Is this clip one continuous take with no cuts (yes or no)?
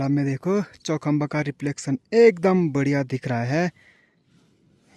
yes